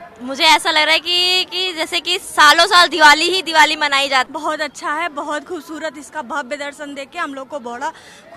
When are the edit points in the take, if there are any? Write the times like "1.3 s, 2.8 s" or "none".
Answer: 4.3 s